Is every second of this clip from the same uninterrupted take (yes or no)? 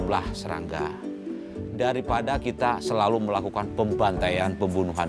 yes